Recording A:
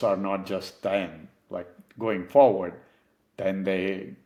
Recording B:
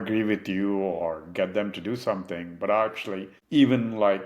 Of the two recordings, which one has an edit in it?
B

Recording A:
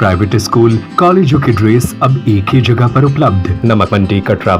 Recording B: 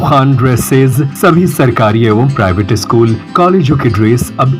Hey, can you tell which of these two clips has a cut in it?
A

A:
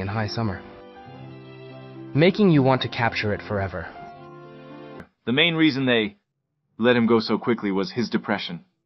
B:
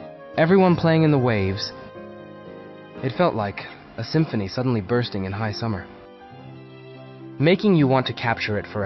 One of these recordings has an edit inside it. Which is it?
A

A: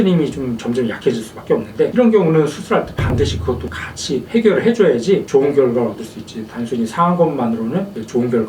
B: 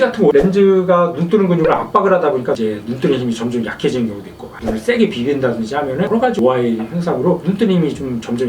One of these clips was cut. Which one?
B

